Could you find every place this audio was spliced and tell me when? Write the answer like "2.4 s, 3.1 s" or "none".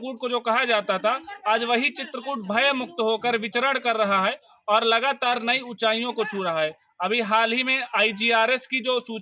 none